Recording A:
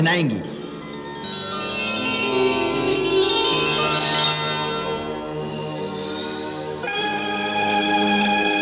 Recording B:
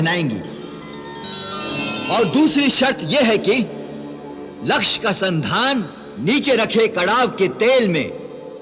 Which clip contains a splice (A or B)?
B